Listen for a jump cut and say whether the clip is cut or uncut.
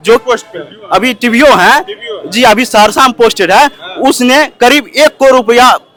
uncut